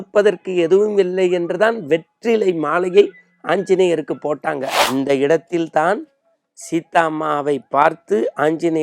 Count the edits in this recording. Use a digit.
1